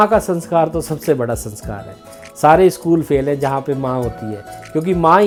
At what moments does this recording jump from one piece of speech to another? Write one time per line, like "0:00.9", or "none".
none